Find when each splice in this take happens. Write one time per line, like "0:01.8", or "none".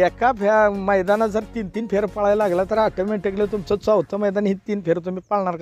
none

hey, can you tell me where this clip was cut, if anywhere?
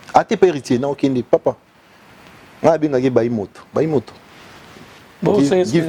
none

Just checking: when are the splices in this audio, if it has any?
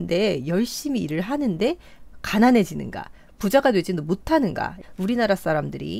0:04.7

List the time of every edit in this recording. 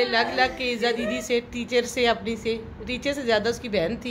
none

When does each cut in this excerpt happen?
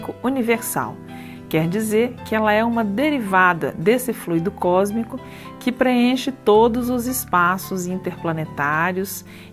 0:06.2

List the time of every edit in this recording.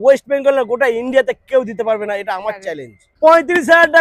0:03.1

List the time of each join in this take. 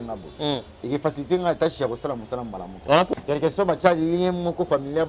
0:03.2

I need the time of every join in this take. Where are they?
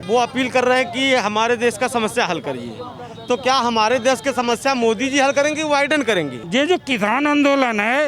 0:06.4

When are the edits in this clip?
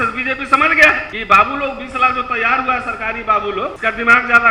0:01.1
0:03.8

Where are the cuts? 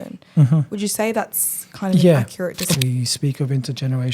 0:02.8

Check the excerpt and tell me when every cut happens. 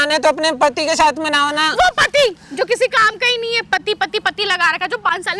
none

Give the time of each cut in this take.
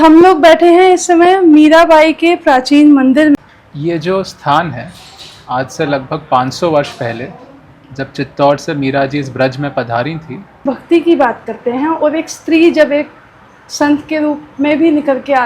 0:03.4
0:10.6

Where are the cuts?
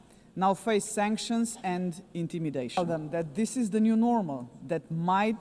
0:02.8

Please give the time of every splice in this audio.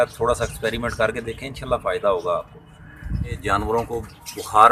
0:03.4

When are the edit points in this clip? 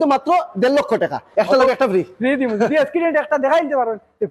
0:01.2

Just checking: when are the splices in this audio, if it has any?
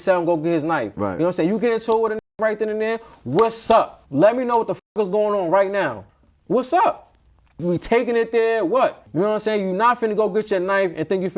none

